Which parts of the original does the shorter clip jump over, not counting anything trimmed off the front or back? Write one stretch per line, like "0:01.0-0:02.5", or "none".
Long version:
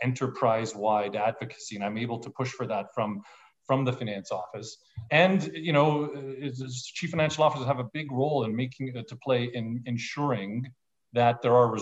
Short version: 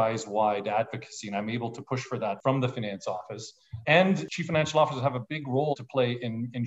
0:02.9-0:03.6
0:05.5-0:06.9
0:08.4-0:09.1